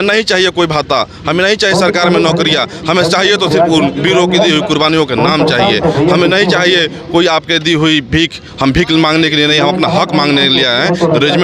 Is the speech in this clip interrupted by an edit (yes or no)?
no